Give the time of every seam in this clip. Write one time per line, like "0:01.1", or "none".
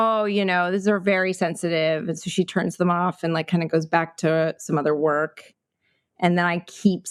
none